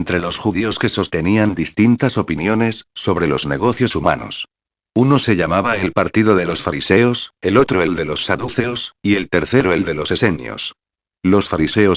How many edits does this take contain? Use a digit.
1